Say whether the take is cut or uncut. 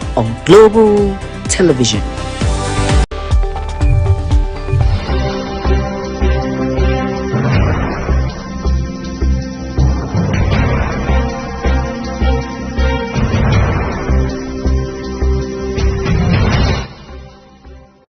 cut